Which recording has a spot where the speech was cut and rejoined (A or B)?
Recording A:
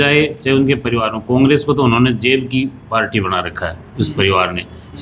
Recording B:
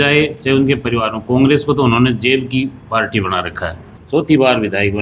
B